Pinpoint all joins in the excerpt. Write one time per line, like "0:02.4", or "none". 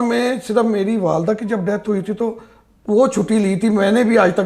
none